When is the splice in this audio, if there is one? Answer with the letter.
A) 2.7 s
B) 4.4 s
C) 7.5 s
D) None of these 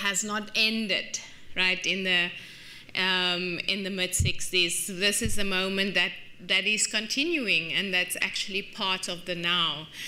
B